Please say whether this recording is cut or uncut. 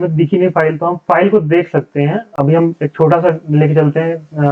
uncut